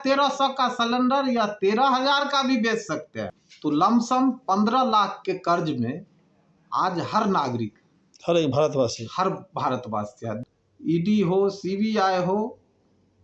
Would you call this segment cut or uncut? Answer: cut